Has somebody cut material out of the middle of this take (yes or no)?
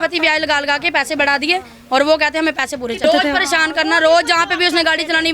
yes